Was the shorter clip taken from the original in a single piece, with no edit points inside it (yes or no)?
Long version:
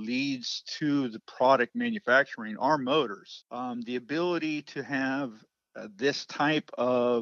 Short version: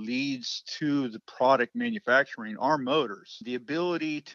no